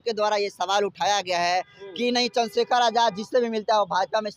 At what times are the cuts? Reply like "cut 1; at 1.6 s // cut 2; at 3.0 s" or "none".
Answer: none